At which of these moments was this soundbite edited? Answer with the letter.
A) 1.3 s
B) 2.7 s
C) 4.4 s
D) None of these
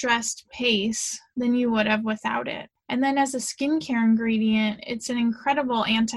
B